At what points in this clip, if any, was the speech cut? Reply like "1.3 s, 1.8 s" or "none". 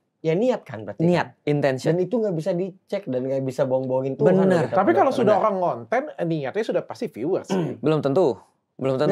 none